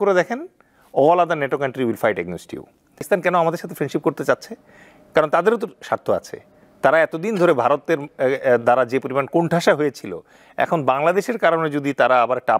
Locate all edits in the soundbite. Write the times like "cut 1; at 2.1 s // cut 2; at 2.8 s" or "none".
cut 1; at 3.0 s